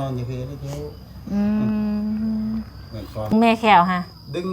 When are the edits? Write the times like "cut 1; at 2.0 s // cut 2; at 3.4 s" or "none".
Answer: cut 1; at 3.3 s